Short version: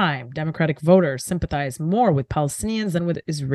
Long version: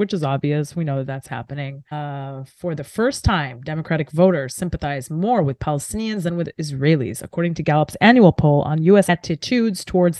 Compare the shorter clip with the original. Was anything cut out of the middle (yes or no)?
no